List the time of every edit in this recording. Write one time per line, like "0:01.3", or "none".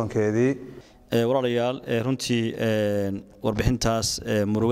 0:00.9